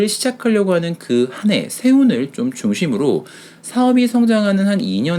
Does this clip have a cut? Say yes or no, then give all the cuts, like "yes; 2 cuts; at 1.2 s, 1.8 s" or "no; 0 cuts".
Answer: no; 0 cuts